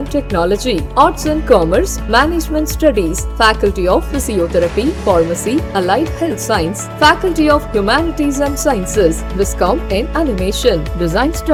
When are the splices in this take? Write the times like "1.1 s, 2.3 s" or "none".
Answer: none